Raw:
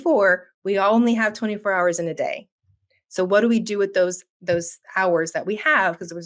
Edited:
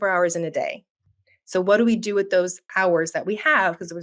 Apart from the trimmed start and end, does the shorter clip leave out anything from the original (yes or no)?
yes